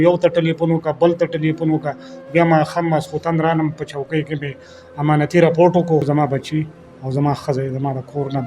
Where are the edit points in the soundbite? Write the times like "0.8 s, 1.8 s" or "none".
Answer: 6.0 s